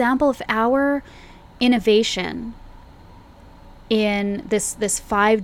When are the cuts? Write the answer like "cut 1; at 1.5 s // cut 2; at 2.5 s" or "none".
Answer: none